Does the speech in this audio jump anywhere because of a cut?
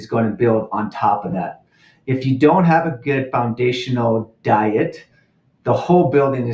no; 0 cuts

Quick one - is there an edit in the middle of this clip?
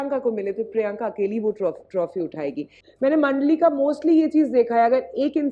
yes; 1 cut; at 2.8 s

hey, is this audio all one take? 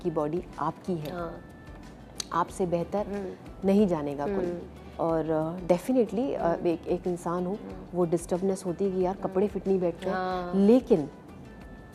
yes; 0 cuts

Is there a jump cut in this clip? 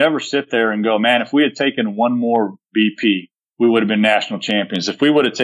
no; 0 cuts

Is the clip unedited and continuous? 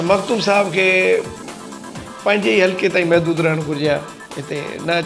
yes; 0 cuts

